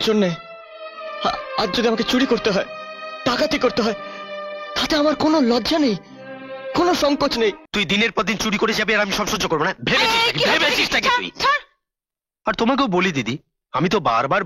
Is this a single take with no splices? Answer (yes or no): no